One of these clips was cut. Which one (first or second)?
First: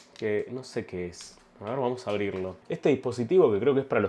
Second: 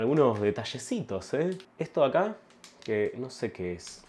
first